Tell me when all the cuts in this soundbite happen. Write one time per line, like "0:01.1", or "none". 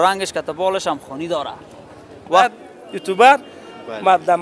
0:02.4